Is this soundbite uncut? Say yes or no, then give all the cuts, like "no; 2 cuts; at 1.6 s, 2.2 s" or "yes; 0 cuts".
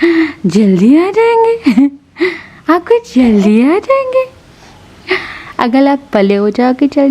yes; 0 cuts